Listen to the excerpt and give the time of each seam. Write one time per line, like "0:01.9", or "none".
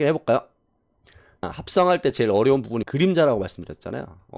0:01.5
0:02.8